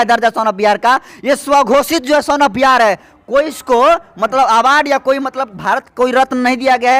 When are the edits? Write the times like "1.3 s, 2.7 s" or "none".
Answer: none